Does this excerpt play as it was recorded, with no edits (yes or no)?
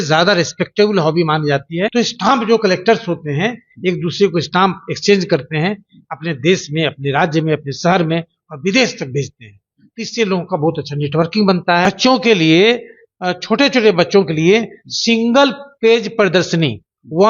no